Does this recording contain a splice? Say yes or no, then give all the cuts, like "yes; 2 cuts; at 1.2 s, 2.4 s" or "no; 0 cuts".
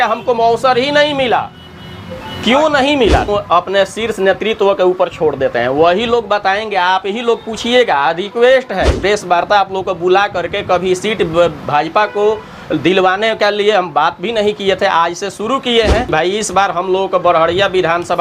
yes; 3 cuts; at 3.3 s, 9.0 s, 16.1 s